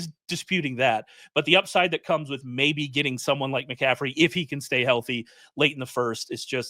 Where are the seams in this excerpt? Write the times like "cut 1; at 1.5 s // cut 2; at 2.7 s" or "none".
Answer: none